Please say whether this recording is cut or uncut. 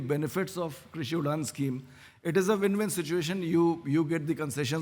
uncut